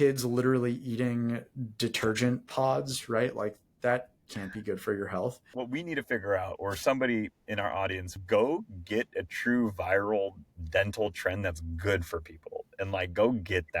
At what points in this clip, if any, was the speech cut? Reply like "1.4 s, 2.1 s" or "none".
5.5 s, 8.1 s